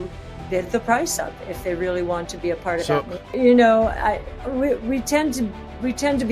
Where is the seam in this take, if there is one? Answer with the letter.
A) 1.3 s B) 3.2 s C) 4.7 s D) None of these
B